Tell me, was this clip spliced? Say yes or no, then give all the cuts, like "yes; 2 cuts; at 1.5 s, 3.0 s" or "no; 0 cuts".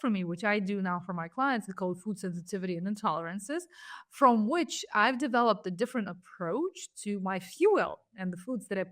no; 0 cuts